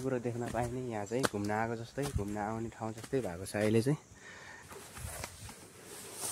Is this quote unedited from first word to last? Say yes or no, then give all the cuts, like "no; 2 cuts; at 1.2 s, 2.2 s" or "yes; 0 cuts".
no; 1 cut; at 4.6 s